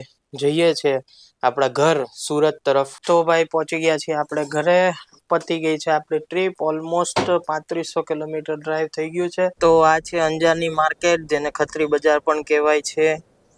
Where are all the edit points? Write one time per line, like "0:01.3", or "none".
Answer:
0:03.0
0:09.6